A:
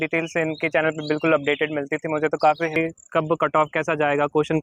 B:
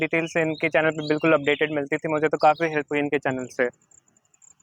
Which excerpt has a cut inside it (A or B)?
A